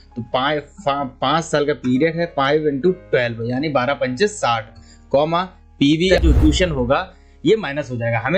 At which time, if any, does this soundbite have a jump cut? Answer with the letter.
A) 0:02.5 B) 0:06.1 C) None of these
B